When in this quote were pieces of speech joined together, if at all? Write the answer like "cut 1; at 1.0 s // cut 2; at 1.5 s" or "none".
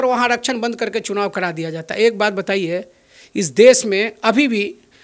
none